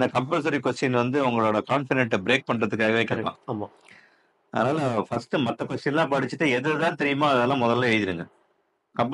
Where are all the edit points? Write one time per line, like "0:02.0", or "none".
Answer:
none